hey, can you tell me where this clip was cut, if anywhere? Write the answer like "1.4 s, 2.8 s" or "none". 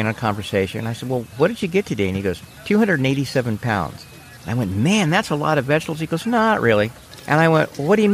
7.1 s